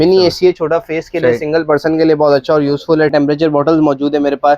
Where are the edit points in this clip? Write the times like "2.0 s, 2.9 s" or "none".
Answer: 3.1 s